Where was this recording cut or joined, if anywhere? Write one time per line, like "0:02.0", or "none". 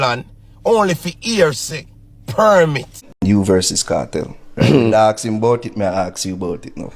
0:03.0